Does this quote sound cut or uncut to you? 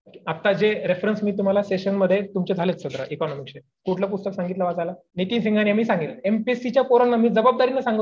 cut